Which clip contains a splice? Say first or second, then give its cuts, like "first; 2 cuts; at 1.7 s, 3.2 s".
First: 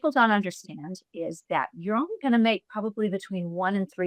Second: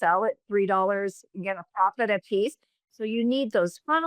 second; 1 cut; at 2.9 s